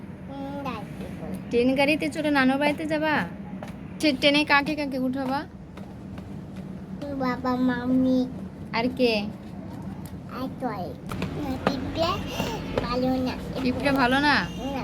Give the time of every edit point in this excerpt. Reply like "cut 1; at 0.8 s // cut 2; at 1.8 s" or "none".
cut 1; at 4.0 s // cut 2; at 11.1 s